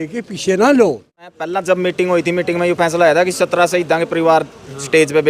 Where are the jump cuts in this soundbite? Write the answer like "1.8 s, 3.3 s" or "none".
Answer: 1.3 s